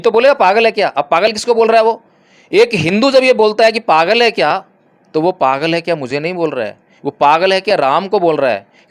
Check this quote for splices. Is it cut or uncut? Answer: uncut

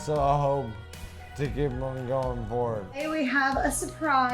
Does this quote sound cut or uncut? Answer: cut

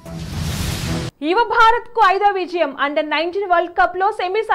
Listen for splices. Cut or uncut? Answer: cut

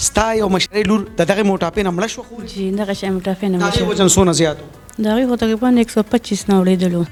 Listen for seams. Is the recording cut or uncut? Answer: uncut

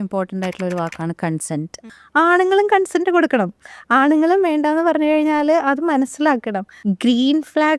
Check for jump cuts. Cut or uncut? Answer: cut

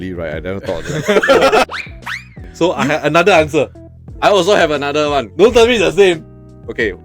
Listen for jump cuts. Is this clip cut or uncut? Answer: cut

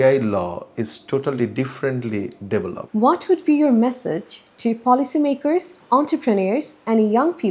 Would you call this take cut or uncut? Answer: cut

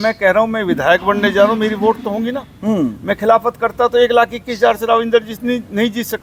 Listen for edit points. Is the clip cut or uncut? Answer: uncut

